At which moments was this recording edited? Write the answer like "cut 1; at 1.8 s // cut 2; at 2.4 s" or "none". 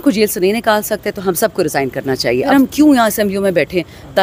cut 1; at 2.5 s

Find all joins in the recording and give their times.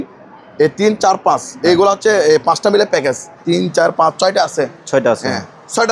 cut 1; at 3.4 s

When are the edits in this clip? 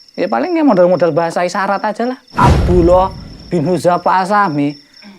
cut 1; at 2.2 s

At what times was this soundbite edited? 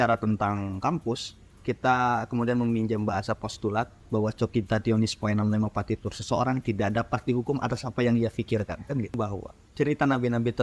cut 1; at 9.2 s

